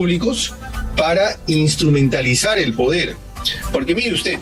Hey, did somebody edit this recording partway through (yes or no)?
no